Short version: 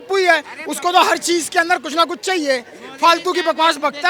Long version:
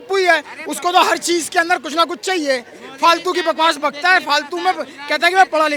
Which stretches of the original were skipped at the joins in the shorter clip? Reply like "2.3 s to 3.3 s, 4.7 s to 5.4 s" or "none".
none